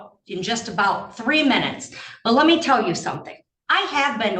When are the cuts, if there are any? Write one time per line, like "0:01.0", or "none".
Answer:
none